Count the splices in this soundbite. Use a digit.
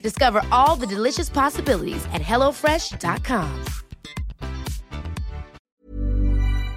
1